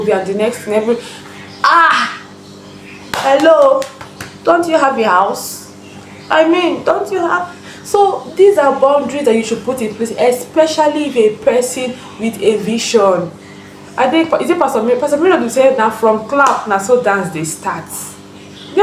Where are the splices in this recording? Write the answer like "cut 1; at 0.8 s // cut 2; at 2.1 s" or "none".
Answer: none